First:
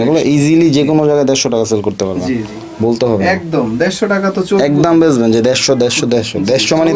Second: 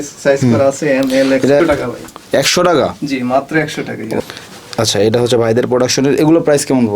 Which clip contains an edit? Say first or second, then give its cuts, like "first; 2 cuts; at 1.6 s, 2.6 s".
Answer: second; 2 cuts; at 1.6 s, 4.2 s